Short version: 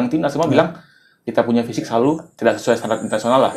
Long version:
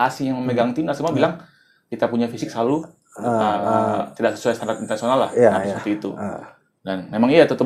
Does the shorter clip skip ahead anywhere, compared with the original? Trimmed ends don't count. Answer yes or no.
yes